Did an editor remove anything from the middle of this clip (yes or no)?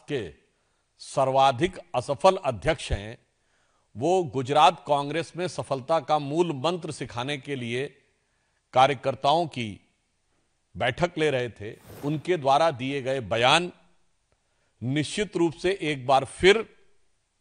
yes